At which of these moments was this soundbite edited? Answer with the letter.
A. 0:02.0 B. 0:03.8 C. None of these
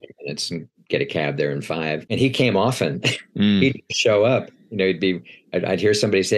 A